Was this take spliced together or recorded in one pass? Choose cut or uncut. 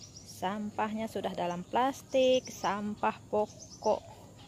uncut